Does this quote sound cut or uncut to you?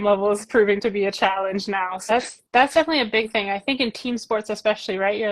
cut